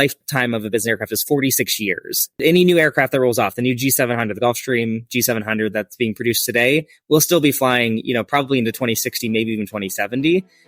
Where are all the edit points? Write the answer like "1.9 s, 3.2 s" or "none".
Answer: 2.4 s